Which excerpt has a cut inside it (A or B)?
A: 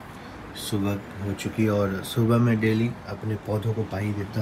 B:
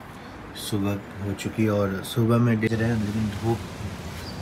B